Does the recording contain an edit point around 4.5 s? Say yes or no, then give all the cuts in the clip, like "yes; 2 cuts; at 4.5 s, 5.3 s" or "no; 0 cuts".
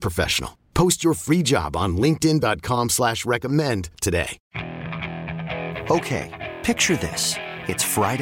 yes; 1 cut; at 4.5 s